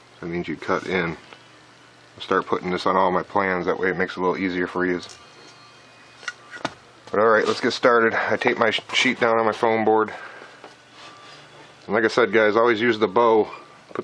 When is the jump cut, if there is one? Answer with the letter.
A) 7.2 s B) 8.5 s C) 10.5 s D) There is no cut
B